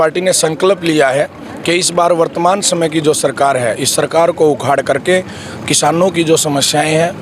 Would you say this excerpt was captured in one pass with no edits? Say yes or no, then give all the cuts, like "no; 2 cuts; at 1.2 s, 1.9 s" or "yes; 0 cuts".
yes; 0 cuts